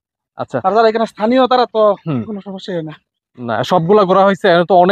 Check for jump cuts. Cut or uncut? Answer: uncut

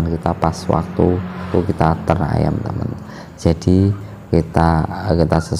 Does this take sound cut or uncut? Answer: cut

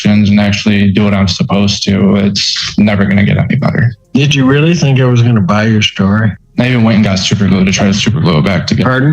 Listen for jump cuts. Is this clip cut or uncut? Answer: cut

